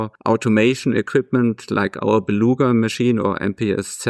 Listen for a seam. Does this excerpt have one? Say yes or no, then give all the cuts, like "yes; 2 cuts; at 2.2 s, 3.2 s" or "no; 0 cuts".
no; 0 cuts